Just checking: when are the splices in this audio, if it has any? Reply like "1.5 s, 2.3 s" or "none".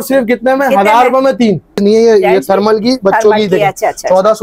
1.8 s

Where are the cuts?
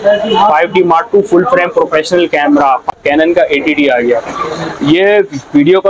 2.9 s

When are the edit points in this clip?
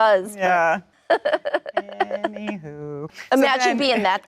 0.9 s, 3.2 s

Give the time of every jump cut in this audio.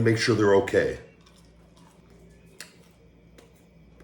2.0 s

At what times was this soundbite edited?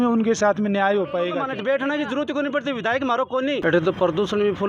1.4 s, 3.6 s

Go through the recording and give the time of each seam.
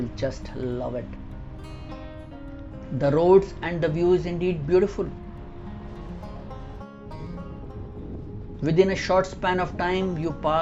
none

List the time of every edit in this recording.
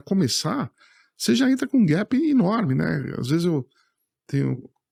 none

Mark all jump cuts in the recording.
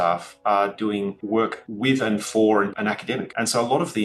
1.2 s, 2.7 s

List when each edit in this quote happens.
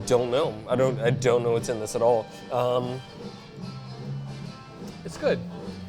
3.1 s

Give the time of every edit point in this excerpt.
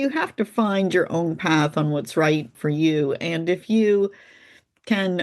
2.6 s

